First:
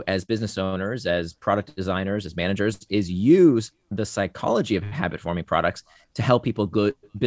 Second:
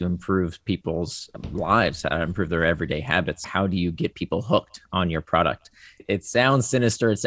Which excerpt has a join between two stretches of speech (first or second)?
second